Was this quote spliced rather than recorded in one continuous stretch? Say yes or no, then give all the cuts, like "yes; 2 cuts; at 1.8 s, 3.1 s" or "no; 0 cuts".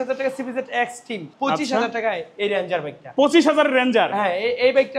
yes; 1 cut; at 1.3 s